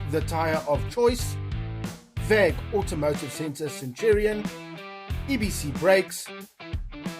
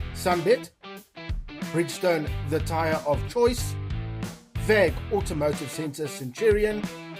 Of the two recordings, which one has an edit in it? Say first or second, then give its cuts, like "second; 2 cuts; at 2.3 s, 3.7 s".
first; 1 cut; at 6.1 s